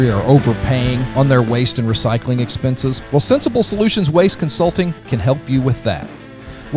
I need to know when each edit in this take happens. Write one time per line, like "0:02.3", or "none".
0:01.1

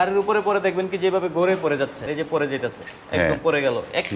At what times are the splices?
0:02.0

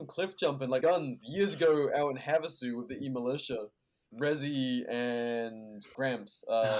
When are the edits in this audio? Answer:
0:00.8
0:04.0

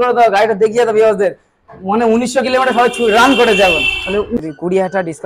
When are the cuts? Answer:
0:04.4

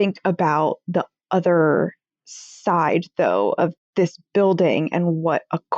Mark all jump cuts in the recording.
none

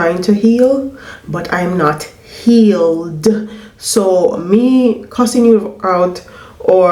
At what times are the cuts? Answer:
none

